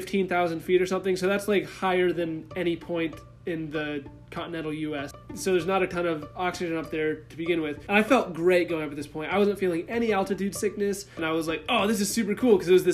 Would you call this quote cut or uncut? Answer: cut